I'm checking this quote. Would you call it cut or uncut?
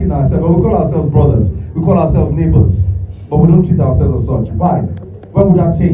uncut